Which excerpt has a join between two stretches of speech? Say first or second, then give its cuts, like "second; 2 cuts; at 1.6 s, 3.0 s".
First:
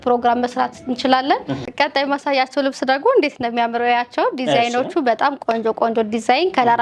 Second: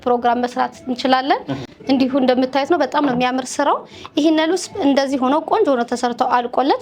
first; 1 cut; at 1.7 s